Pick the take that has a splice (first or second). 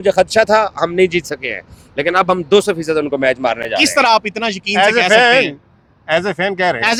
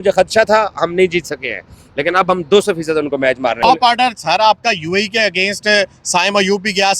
second